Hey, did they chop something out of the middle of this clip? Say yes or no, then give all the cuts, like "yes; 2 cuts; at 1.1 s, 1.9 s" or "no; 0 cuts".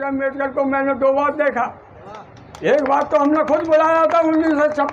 no; 0 cuts